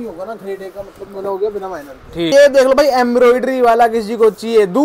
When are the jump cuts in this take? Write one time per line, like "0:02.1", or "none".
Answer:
0:02.3